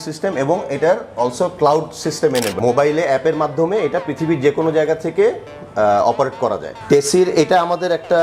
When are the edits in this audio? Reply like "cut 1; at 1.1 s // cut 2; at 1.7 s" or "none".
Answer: cut 1; at 2.5 s // cut 2; at 6.8 s